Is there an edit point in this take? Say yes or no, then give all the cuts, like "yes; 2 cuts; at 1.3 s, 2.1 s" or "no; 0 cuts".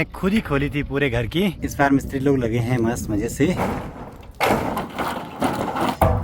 no; 0 cuts